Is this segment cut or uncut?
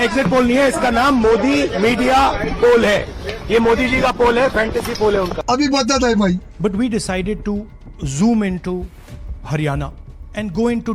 uncut